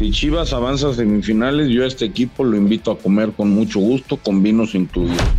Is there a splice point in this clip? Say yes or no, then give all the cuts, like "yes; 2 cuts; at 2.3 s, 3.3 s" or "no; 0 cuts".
no; 0 cuts